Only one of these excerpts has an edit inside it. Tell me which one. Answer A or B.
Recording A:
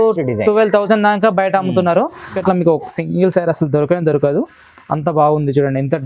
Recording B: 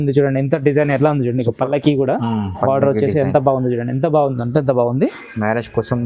A